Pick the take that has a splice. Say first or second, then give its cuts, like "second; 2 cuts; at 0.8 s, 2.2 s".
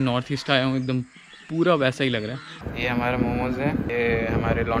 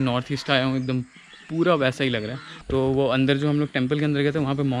first; 2 cuts; at 2.6 s, 3.9 s